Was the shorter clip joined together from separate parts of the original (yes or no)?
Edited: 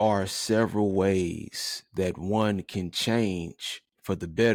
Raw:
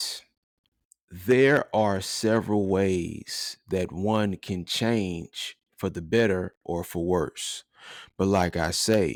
no